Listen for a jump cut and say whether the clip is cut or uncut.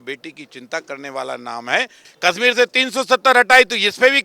cut